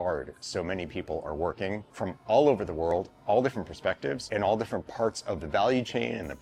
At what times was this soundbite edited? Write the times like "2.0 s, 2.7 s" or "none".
1.9 s, 4.2 s